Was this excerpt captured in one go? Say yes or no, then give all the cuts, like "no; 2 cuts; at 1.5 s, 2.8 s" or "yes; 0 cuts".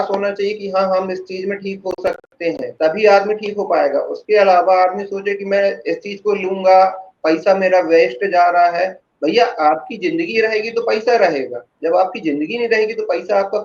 yes; 0 cuts